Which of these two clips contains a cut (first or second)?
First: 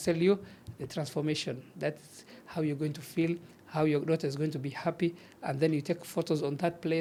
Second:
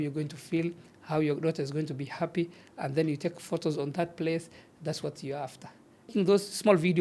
second